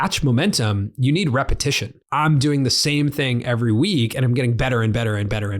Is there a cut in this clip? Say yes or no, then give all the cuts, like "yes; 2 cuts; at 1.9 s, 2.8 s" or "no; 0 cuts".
yes; 1 cut; at 1.9 s